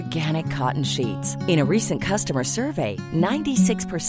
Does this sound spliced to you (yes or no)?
no